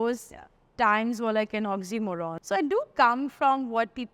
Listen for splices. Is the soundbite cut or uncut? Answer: cut